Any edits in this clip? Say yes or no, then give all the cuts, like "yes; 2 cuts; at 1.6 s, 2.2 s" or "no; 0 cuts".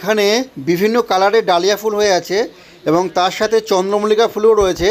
no; 0 cuts